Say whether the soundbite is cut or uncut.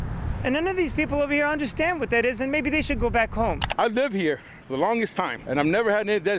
cut